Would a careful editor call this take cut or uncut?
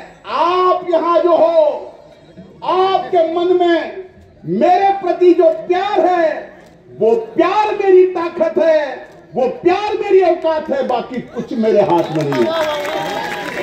uncut